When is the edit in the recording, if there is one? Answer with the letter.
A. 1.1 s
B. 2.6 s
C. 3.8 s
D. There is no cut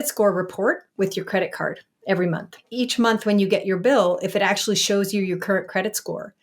B